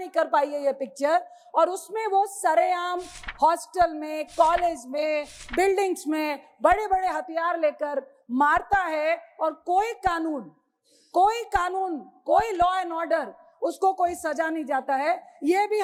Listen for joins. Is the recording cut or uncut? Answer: uncut